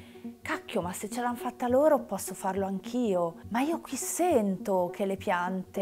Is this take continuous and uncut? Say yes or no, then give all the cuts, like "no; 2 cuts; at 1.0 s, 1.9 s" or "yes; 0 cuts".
no; 1 cut; at 3.4 s